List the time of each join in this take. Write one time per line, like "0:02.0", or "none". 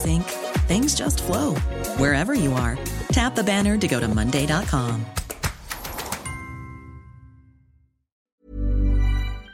0:08.4